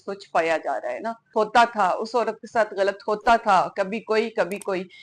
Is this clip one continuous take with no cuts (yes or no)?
no